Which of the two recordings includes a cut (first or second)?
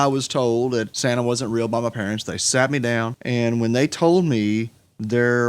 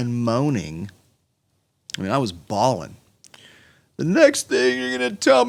first